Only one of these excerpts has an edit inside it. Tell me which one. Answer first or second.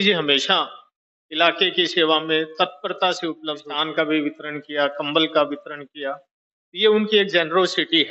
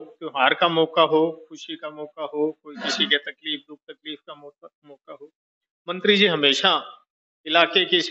first